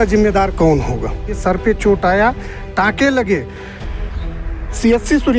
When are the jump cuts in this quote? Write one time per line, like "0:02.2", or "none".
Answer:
0:01.4